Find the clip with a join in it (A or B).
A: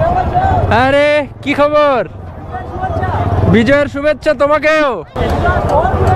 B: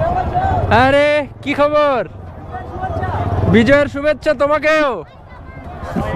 A